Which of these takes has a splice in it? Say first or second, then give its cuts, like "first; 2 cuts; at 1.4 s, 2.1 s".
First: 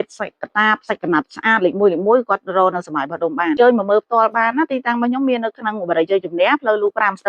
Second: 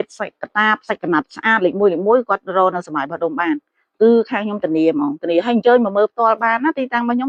first; 1 cut; at 3.6 s